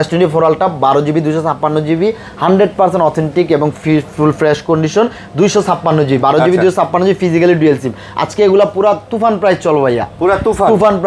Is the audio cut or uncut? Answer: uncut